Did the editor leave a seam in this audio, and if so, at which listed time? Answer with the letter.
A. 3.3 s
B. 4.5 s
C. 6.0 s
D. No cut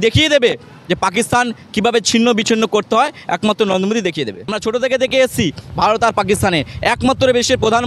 B